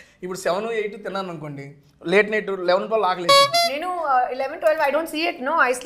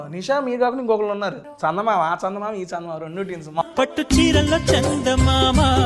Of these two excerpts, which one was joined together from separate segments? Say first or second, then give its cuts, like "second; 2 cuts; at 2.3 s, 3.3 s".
second; 2 cuts; at 1.5 s, 3.6 s